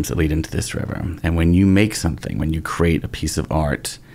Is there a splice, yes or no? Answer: no